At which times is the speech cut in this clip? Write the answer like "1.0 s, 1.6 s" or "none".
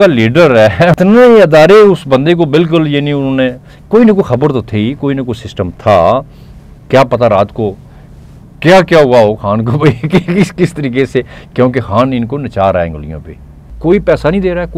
0.9 s, 13.7 s